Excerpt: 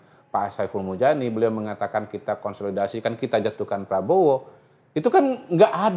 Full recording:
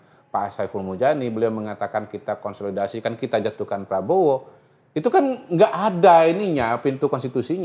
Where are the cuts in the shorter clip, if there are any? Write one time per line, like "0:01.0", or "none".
none